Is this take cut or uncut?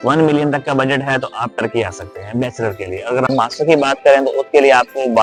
uncut